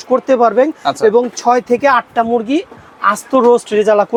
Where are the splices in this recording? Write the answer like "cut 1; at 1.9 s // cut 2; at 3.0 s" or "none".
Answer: none